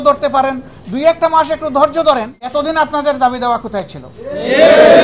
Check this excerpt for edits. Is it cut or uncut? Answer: cut